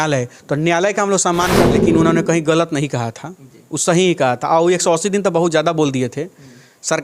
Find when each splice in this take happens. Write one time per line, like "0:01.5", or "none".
0:01.7